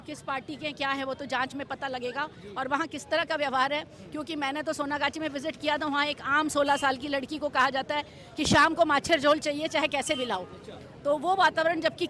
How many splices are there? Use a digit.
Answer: 0